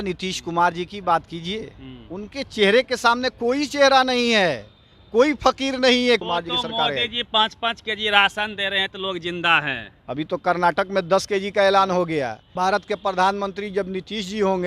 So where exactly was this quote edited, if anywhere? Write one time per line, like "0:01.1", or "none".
0:06.2
0:12.5